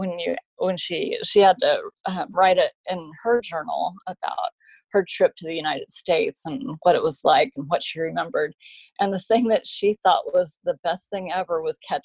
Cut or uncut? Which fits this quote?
uncut